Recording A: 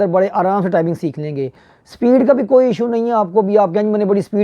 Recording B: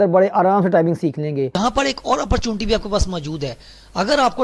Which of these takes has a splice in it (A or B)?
B